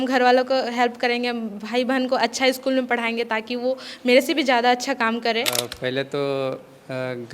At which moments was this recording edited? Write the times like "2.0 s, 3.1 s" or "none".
5.5 s

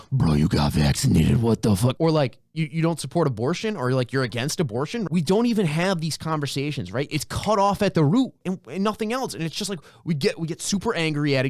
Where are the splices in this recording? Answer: 1.9 s, 5.1 s

